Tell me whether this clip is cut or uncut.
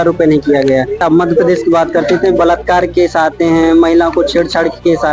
cut